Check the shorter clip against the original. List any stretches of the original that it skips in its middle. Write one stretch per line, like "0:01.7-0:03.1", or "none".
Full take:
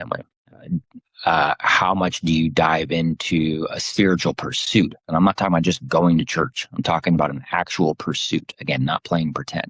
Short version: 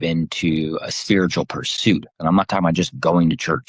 none